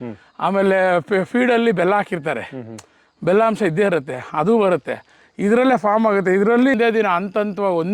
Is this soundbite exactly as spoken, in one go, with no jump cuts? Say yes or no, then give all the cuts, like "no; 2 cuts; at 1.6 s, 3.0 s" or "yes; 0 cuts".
no; 1 cut; at 6.7 s